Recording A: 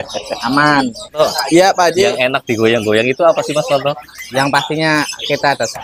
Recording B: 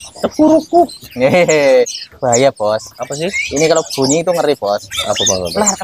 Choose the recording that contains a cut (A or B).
A